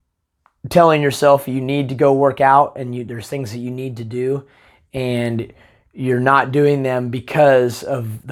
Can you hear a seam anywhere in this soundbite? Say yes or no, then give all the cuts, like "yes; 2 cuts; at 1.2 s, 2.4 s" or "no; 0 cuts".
no; 0 cuts